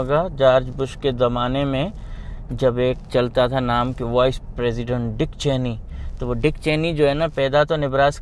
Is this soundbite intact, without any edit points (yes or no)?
yes